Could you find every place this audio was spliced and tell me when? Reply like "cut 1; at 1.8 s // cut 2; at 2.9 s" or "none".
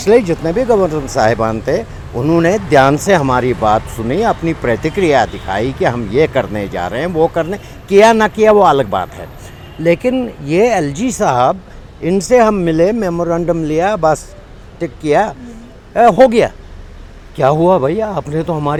none